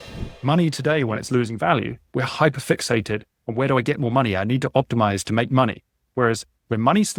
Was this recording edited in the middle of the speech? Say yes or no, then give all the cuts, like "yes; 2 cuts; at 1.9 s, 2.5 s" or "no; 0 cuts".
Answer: no; 0 cuts